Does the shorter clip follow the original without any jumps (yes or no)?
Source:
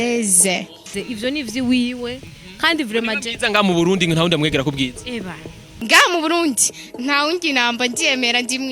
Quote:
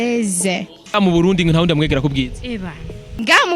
no